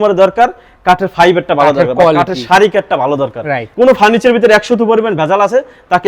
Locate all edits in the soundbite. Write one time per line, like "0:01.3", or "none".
0:03.7